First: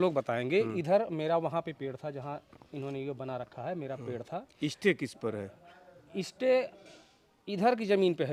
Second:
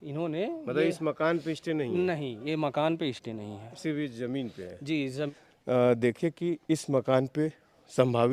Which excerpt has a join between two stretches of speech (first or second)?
second